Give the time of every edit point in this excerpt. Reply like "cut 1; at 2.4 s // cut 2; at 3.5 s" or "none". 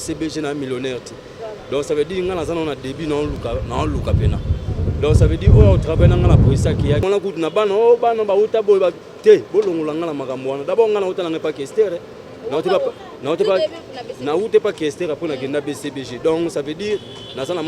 cut 1; at 7.0 s